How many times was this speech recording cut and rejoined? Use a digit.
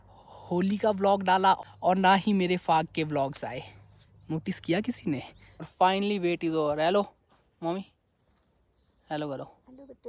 2